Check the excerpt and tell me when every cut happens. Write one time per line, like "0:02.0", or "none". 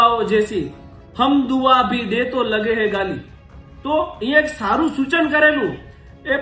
none

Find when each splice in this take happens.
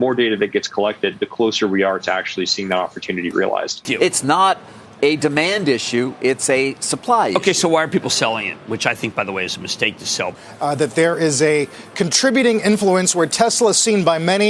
0:03.9
0:10.4

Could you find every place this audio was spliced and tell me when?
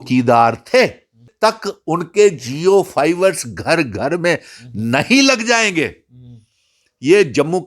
0:01.3

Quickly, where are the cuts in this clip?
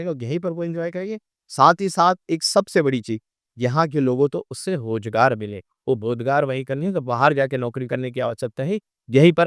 none

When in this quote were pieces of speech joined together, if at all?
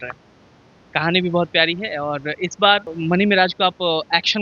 0:02.9

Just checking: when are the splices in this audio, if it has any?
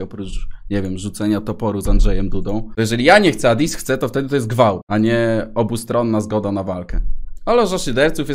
none

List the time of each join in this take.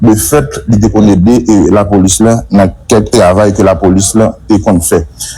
none

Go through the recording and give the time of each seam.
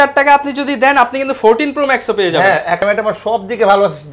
0:02.8

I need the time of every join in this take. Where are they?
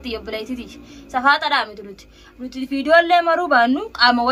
none

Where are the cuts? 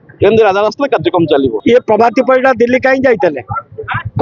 0:01.6

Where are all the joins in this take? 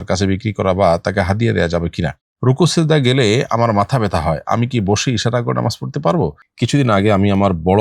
0:02.2
0:06.4

